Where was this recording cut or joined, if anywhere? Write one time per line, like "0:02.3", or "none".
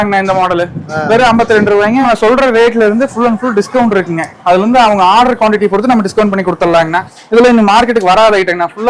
0:02.0
0:07.2